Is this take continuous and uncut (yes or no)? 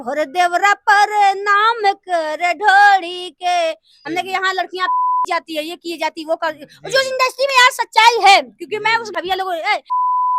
no